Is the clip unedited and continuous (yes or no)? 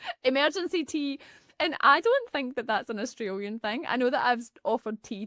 yes